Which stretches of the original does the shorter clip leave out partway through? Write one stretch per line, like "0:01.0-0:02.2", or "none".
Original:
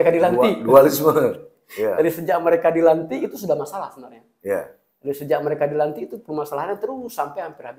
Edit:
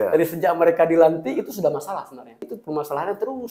0:04.3-0:06.1

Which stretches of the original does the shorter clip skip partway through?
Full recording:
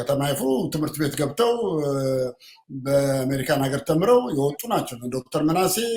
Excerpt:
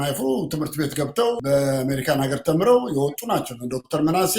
0:01.6-0:02.8

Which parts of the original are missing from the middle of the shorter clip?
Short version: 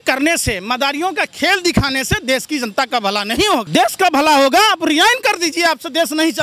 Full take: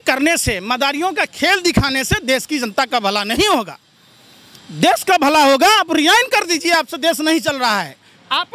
0:03.7-0:04.7

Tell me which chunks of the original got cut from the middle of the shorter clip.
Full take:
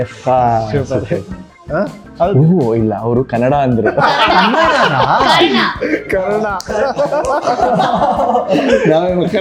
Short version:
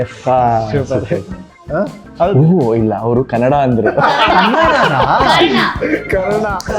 none

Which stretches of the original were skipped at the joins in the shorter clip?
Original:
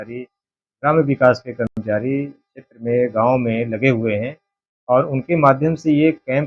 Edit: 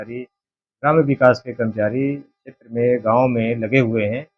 0:01.7-0:01.8

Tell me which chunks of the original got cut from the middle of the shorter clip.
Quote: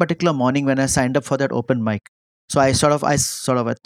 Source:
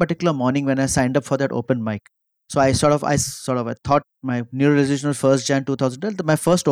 none

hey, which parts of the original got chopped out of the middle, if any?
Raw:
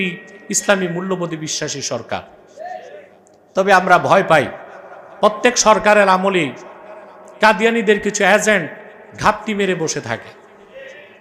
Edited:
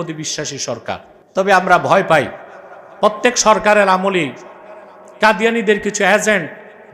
0:02.4-0:03.3

